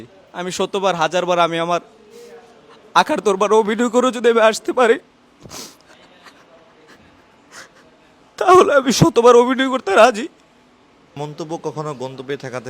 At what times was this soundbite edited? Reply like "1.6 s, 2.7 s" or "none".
11.1 s